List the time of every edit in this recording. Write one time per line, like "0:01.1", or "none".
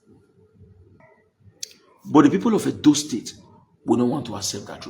0:01.0